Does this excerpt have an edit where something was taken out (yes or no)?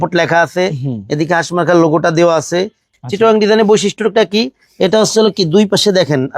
yes